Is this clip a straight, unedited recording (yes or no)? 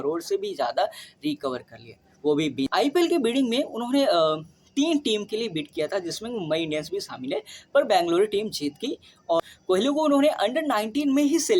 no